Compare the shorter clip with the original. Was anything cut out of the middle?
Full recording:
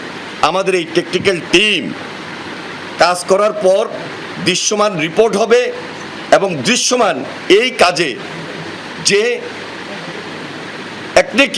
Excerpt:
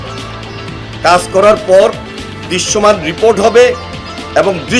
no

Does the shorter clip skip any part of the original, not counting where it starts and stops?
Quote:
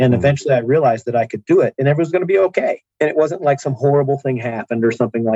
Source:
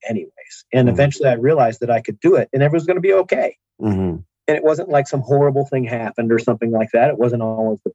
yes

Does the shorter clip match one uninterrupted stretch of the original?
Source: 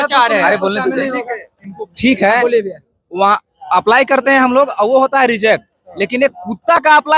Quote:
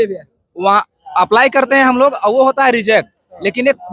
yes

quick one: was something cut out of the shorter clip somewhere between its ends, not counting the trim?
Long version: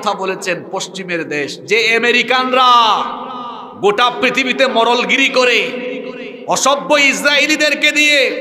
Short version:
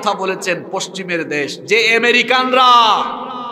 no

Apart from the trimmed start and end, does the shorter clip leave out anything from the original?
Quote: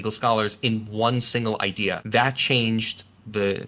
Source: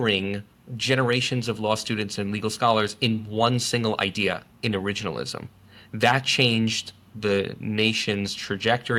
yes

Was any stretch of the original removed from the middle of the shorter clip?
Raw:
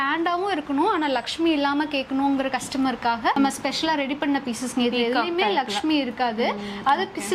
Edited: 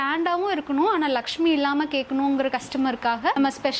no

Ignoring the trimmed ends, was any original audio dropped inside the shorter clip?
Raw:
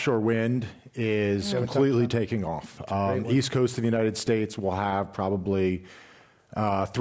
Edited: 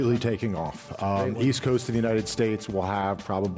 no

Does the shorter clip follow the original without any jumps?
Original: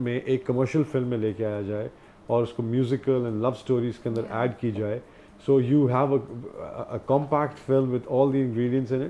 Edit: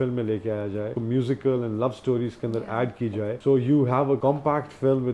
no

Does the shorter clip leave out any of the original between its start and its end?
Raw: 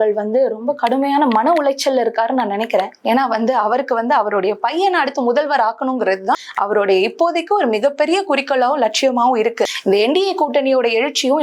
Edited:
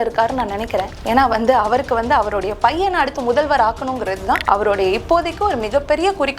yes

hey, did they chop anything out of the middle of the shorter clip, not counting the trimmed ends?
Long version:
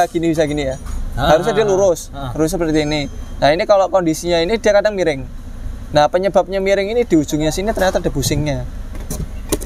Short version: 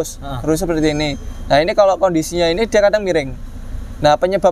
no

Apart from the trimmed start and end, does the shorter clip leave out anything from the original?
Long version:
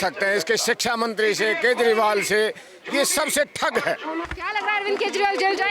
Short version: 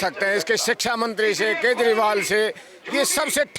no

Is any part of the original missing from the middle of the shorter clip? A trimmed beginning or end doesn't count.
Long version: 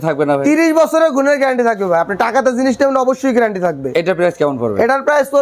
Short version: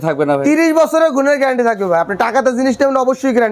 no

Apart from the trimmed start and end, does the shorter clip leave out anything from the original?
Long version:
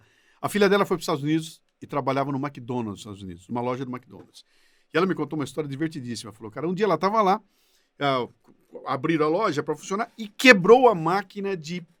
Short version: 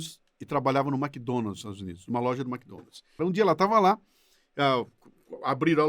yes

